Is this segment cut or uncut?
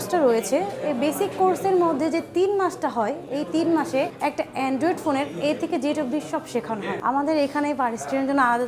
cut